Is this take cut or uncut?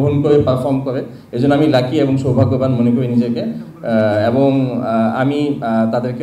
uncut